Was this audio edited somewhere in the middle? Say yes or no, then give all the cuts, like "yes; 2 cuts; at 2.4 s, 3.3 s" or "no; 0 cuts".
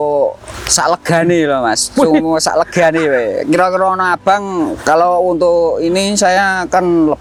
no; 0 cuts